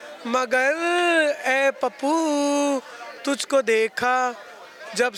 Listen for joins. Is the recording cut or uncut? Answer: uncut